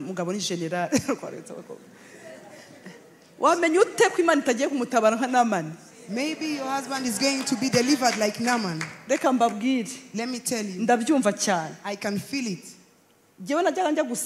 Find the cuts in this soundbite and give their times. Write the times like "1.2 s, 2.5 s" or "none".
none